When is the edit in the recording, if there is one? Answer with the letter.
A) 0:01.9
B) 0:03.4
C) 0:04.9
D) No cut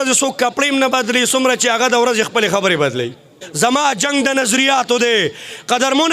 B